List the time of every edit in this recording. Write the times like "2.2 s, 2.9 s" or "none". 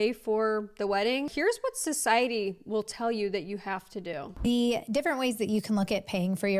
1.3 s

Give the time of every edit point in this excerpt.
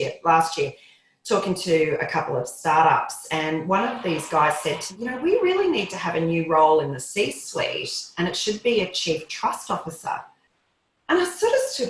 4.9 s

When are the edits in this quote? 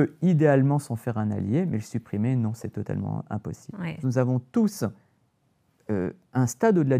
4.0 s

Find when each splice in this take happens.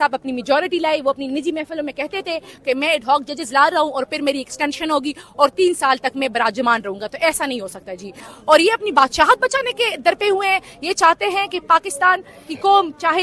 8.3 s

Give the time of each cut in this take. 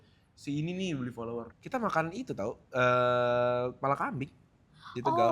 1.5 s

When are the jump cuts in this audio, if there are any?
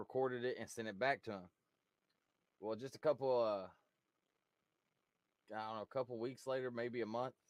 none

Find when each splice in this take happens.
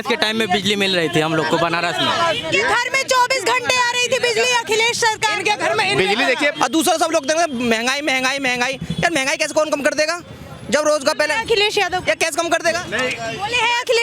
6.6 s, 12.8 s

